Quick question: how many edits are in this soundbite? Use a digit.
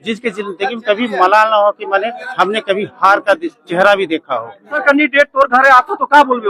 1